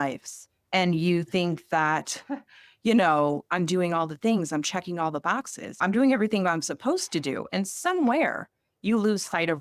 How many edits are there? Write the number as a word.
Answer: one